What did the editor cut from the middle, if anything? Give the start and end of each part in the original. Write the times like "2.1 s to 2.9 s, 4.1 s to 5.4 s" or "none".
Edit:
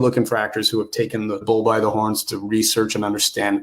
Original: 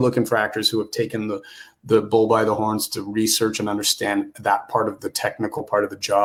1.4 s to 2.1 s